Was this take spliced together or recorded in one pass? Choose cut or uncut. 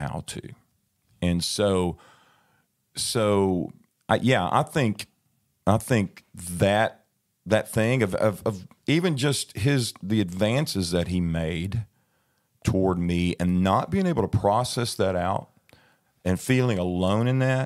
uncut